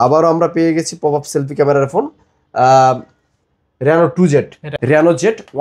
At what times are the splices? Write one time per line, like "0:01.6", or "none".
0:04.7